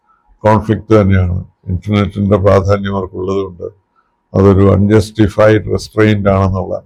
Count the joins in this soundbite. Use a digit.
0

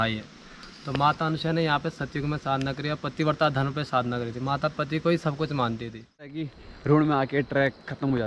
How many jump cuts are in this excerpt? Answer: 1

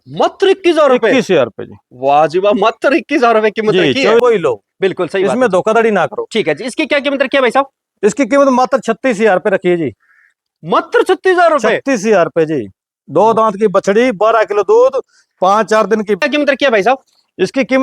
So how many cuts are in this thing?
2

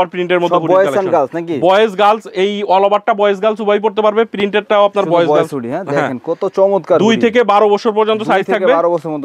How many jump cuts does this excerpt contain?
0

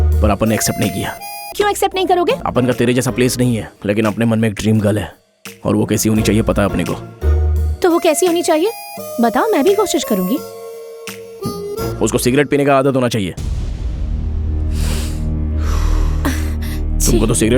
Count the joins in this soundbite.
3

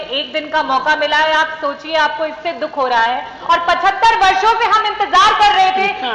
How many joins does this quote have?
0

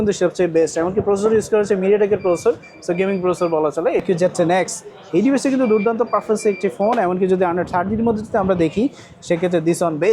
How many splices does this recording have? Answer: 1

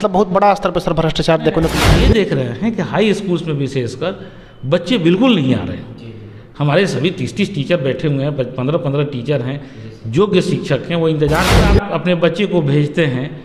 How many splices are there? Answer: 2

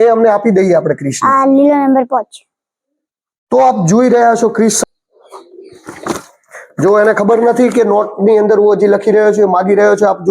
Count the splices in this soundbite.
1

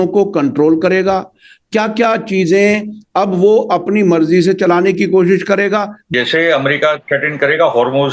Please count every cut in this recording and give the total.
1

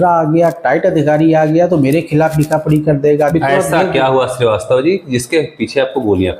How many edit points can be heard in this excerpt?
1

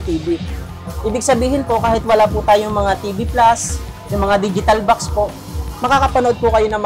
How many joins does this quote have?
0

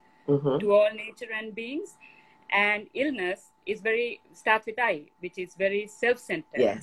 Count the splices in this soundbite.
0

